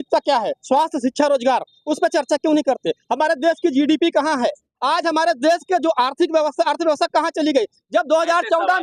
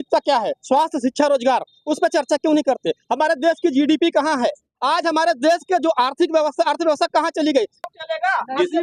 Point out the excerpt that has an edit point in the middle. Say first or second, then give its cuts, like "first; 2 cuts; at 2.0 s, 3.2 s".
second; 1 cut; at 7.8 s